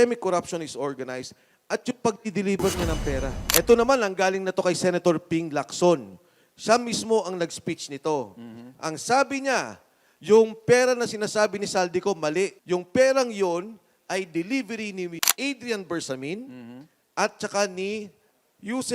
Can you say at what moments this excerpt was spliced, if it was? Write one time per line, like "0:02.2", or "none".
0:03.3
0:12.6
0:15.2